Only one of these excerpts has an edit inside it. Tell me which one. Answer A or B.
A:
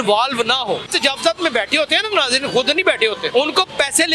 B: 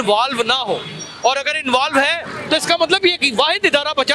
A